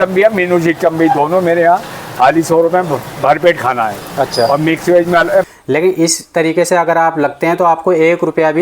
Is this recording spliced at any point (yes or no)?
yes